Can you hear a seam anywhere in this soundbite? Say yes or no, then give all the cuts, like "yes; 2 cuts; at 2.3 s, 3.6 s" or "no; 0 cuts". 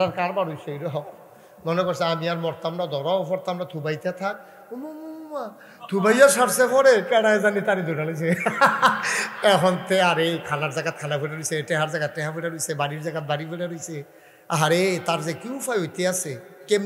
no; 0 cuts